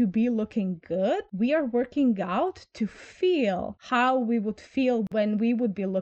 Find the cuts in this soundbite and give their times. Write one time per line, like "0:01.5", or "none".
0:05.1